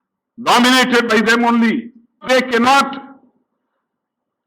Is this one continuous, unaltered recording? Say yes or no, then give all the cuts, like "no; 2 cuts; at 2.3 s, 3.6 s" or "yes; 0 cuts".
no; 1 cut; at 2.2 s